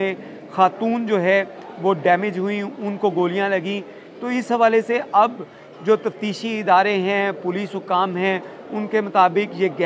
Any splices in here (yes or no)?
no